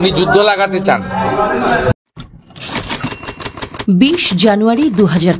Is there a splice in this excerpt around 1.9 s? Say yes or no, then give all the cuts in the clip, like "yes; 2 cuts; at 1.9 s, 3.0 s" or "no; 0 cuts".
yes; 1 cut; at 1.9 s